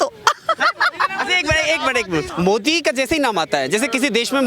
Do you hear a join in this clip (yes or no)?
yes